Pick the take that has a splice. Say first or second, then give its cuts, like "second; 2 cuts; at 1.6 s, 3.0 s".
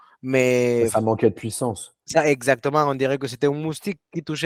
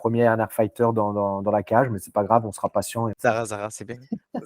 second; 1 cut; at 3.1 s